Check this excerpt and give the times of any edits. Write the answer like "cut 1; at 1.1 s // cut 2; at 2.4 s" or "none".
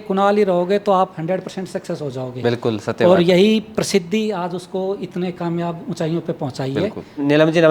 none